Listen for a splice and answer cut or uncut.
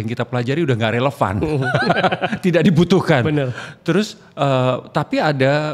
uncut